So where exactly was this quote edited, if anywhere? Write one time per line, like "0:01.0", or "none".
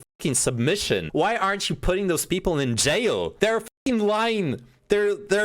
0:01.1
0:03.3